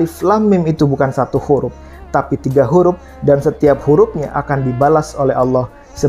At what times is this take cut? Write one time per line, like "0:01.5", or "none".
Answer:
none